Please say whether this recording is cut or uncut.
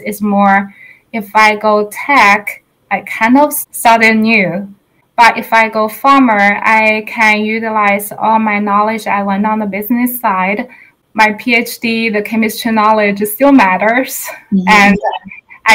cut